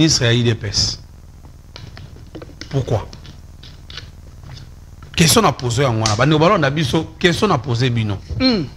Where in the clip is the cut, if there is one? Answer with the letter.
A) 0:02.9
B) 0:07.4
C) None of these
C